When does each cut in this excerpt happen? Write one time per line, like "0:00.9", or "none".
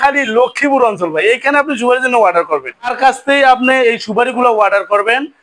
0:03.0